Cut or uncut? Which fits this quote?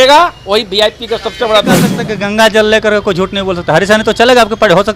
cut